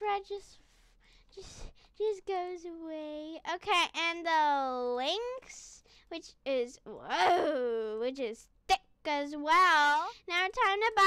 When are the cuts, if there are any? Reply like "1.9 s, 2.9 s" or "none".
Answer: 10.1 s

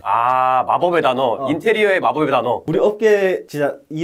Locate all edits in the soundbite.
none

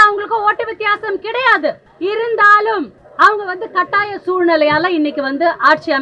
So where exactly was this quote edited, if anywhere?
1.9 s, 3.0 s

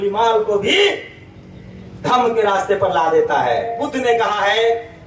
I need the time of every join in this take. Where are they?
3.8 s

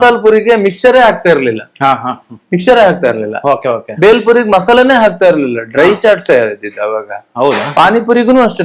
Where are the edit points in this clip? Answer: none

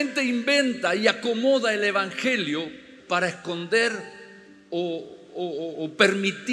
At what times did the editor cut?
none

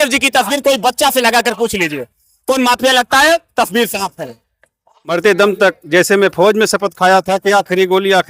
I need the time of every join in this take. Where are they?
5.2 s

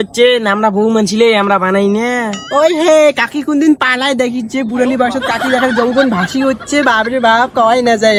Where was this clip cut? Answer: none

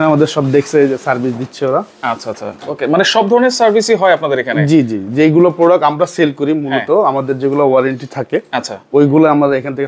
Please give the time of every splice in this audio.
none

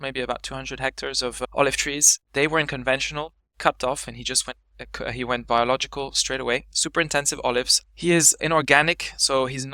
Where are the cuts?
1.5 s, 7.7 s

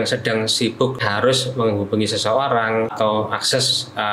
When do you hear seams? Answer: 1.0 s, 2.9 s

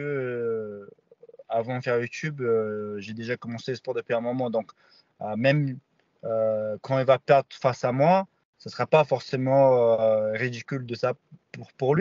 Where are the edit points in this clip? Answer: none

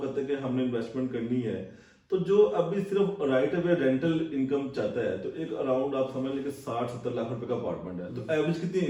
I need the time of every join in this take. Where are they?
none

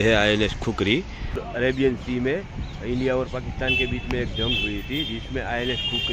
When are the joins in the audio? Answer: 1.3 s

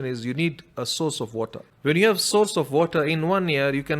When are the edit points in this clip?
1.7 s

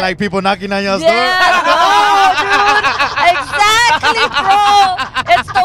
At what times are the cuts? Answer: none

